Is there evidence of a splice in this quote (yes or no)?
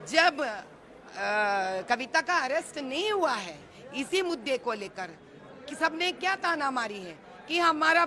no